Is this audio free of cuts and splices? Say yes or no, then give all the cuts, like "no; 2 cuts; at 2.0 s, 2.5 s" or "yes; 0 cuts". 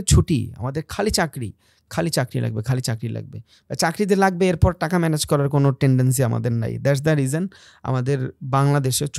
yes; 0 cuts